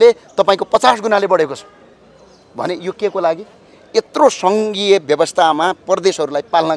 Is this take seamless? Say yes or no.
yes